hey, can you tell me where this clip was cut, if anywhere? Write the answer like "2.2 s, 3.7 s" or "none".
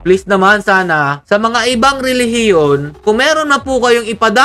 1.2 s